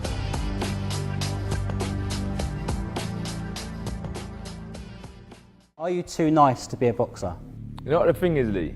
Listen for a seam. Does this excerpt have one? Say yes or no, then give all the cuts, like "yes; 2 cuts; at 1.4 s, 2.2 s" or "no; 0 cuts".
yes; 1 cut; at 6.1 s